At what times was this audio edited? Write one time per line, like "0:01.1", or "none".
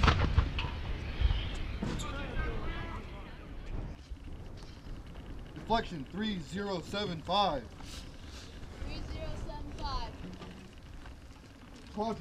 0:03.9